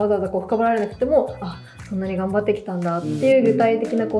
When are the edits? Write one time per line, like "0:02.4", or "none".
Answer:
none